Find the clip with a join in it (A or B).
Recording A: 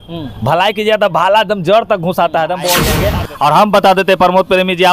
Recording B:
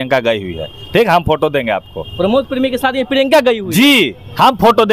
A